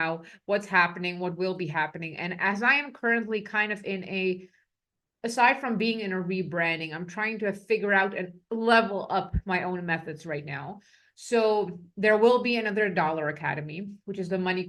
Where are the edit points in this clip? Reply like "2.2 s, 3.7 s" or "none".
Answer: none